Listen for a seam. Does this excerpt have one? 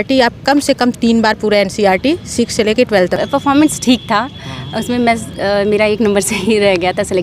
yes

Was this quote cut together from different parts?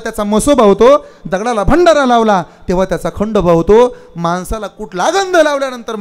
no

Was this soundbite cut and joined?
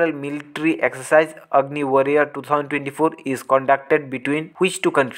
no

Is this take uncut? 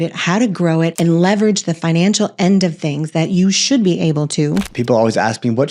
no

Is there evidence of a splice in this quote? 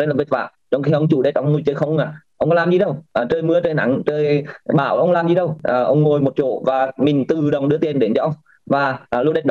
yes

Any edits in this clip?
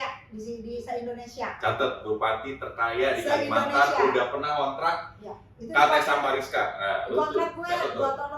no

